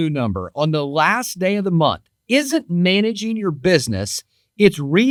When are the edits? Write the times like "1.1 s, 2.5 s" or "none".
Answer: none